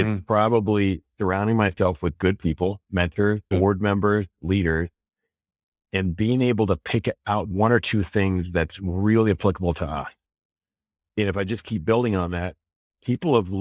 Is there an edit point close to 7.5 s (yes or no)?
yes